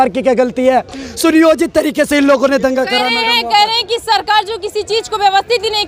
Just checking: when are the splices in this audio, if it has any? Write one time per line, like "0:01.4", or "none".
none